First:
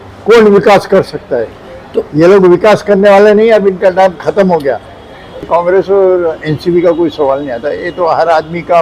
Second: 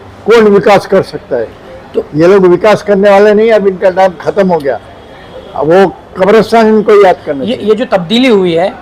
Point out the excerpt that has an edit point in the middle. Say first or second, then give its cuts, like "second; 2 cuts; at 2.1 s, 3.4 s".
first; 1 cut; at 5.5 s